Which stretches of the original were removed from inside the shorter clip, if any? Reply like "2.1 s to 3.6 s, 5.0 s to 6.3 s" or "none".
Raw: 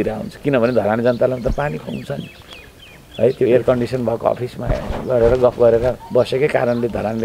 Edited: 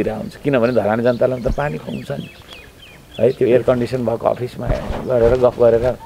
none